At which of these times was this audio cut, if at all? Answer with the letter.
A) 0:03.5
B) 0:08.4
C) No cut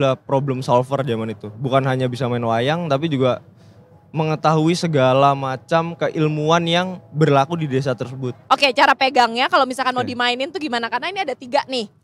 B